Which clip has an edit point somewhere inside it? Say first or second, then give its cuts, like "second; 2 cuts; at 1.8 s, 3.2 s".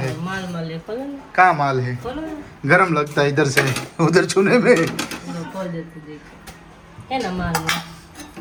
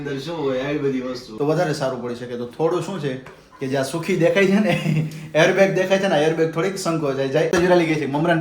second; 2 cuts; at 1.2 s, 7.5 s